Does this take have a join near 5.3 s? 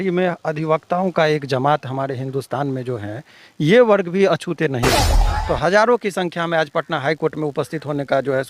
yes; 1 cut; at 5.3 s

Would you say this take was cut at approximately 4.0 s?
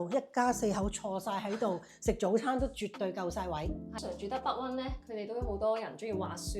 yes; 1 cut; at 4.0 s

